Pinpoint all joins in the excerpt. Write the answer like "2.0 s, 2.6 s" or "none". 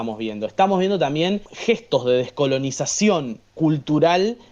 1.5 s